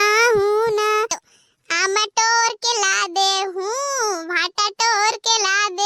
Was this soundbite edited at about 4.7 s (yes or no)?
no